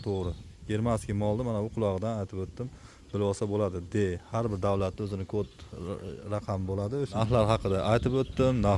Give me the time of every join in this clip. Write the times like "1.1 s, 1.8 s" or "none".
7.2 s